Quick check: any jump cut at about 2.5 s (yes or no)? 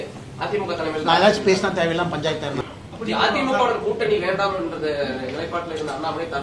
yes